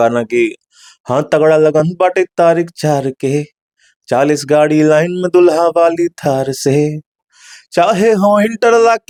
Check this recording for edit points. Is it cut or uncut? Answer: uncut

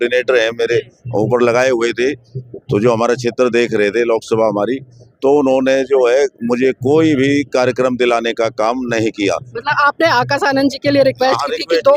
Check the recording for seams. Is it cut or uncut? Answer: uncut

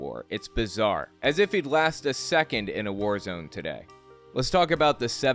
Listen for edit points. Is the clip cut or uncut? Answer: cut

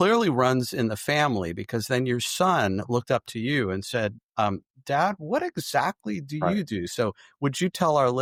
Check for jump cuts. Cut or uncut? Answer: uncut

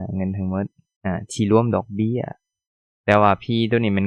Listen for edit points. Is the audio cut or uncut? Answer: uncut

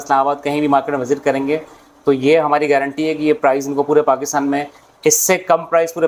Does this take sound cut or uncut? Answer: uncut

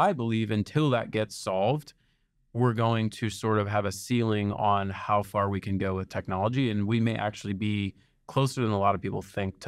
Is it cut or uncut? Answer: uncut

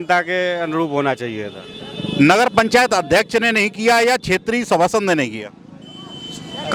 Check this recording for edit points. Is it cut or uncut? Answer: uncut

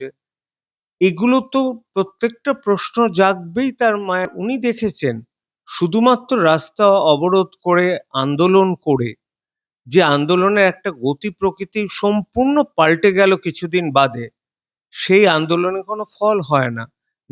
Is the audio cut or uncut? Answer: cut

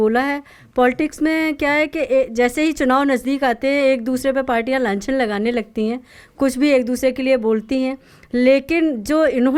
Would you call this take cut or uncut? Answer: uncut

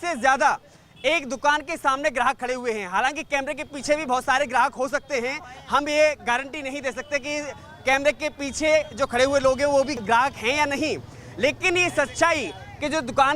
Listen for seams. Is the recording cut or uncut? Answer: uncut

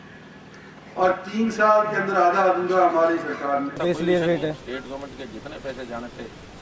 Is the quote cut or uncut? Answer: cut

